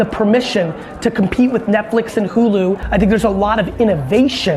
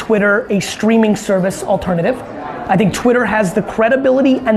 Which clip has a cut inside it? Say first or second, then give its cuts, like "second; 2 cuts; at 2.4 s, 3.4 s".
first; 1 cut; at 2.8 s